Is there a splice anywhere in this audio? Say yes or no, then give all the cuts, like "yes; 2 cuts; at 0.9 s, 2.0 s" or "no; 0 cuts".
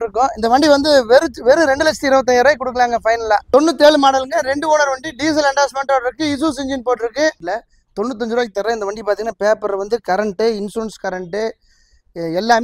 yes; 2 cuts; at 3.5 s, 7.4 s